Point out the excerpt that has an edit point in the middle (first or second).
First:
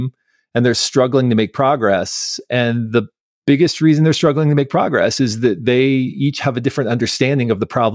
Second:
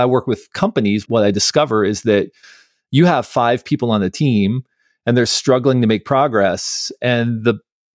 second